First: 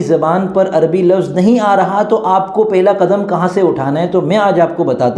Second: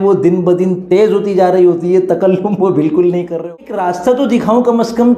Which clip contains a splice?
second; 1 cut; at 3.4 s

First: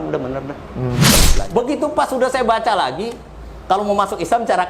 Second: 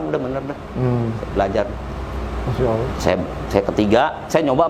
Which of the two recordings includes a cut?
first; 1 cut; at 1.1 s

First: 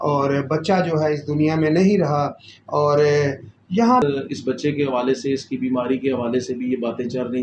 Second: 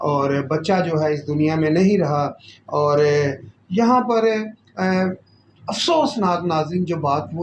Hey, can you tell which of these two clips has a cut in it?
first; 1 cut; at 4.0 s

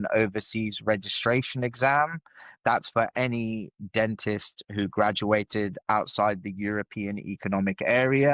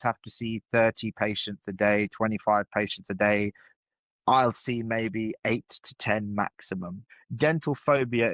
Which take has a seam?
second; 2 cuts; at 3.8 s, 7.2 s

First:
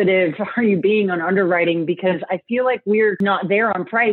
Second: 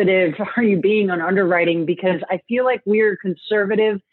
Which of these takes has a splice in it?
first; 1 cut; at 3.2 s

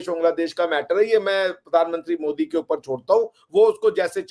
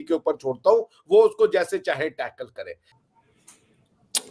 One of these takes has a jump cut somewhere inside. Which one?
second; 1 cut; at 2.9 s

